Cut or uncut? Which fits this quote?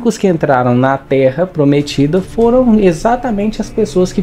uncut